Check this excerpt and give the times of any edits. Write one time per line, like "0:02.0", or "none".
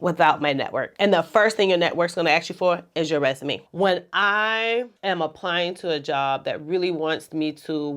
0:03.6